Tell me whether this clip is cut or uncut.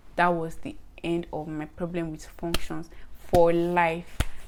uncut